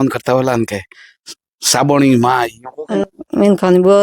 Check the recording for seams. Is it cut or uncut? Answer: cut